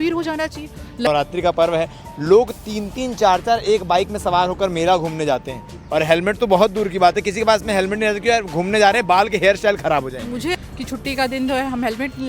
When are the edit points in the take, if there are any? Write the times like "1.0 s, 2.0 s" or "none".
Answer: 1.1 s, 10.5 s